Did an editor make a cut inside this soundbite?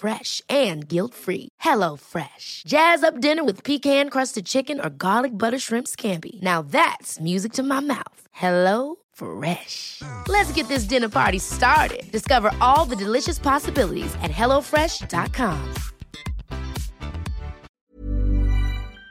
yes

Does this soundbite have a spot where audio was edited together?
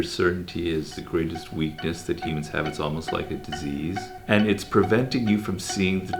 yes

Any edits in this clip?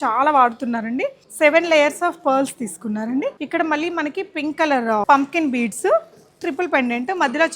yes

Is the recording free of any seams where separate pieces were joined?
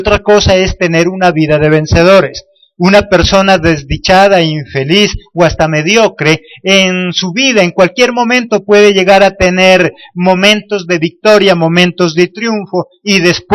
yes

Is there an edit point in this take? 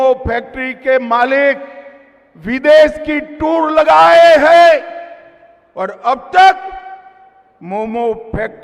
no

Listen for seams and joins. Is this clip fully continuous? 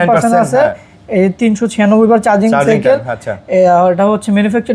yes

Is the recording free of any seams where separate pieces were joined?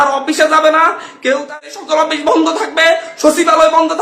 no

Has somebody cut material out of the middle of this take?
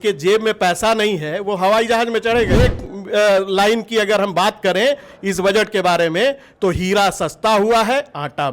yes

